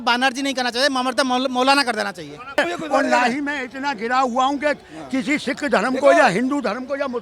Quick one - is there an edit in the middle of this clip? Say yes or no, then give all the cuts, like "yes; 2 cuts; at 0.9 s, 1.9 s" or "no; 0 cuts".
yes; 1 cut; at 2.6 s